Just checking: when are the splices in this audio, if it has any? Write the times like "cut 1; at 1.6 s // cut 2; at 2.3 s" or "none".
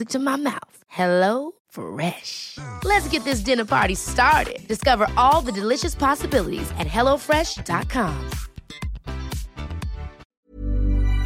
cut 1; at 10.3 s